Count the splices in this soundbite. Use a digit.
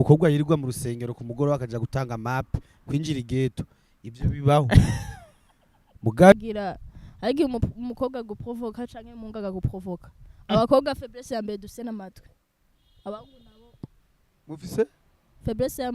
1